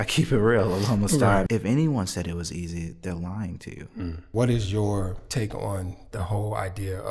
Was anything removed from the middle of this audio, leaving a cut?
yes; 2 cuts; at 1.5 s, 4.2 s

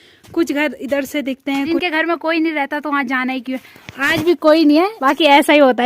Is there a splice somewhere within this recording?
yes; 2 cuts; at 1.7 s, 4.9 s

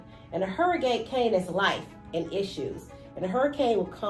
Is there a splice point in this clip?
no; 0 cuts

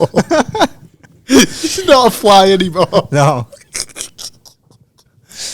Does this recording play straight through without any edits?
yes; 0 cuts

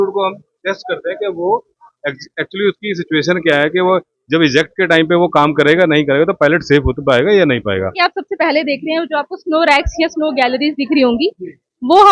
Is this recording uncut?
no; 1 cut; at 7.9 s

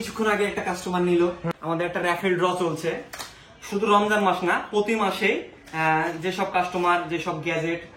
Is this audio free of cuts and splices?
no; 1 cut; at 1.5 s

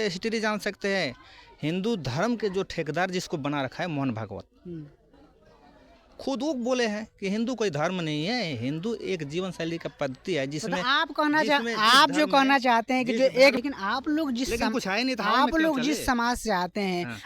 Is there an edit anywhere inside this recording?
yes; 1 cut; at 13.5 s

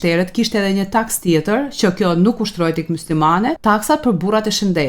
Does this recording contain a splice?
yes; 1 cut; at 3.6 s

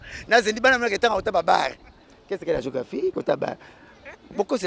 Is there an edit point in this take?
no; 0 cuts

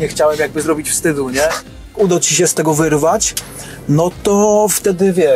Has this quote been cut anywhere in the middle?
yes; 1 cut; at 1.9 s

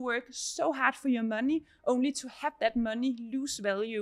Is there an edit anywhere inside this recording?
no; 0 cuts

